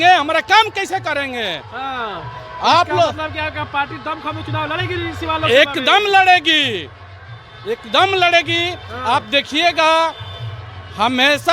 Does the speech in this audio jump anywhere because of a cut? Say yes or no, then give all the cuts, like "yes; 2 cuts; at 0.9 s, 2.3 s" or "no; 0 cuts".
no; 0 cuts